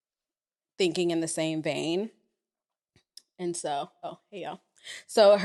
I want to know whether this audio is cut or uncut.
uncut